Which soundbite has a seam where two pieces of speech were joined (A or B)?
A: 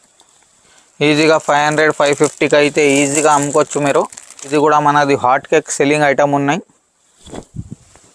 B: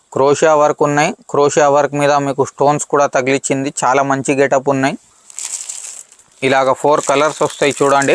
A